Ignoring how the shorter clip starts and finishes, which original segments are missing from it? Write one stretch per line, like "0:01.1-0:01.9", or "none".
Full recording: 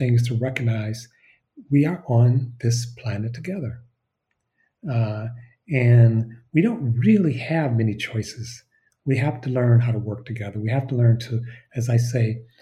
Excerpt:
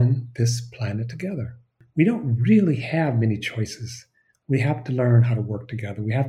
0:04.0-0:06.4